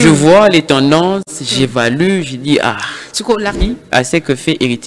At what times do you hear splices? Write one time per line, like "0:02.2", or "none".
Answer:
0:03.6